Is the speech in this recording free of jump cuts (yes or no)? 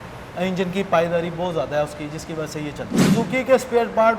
no